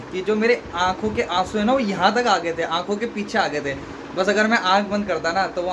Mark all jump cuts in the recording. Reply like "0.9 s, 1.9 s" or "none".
none